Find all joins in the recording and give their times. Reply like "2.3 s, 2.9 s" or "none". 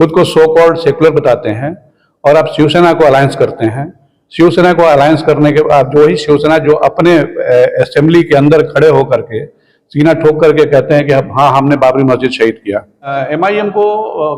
13.2 s